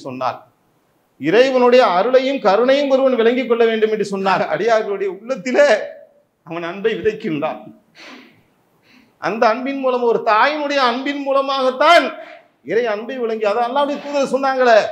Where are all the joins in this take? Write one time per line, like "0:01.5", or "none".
0:04.4